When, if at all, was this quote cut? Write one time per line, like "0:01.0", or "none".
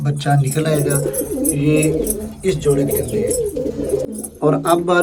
none